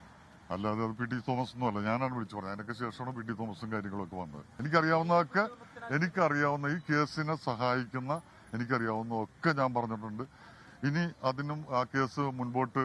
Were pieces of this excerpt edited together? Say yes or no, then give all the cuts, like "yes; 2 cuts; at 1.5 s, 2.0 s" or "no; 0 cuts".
yes; 1 cut; at 4.5 s